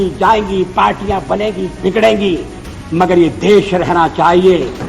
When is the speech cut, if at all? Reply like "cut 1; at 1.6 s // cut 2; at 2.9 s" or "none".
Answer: none